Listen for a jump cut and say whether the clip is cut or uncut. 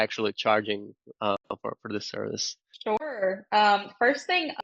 uncut